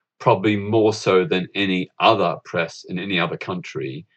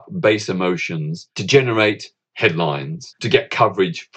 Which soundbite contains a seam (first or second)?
second